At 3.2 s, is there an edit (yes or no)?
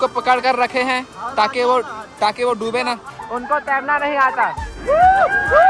yes